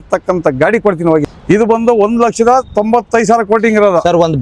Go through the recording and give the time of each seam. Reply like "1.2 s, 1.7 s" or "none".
1.3 s